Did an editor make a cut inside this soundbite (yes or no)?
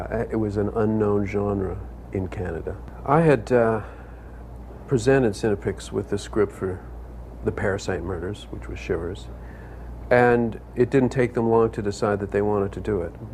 no